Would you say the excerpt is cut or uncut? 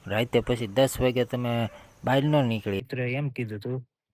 cut